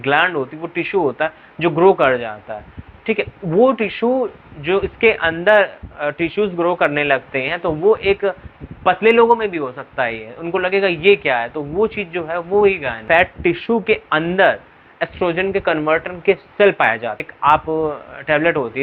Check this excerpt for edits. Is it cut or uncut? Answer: cut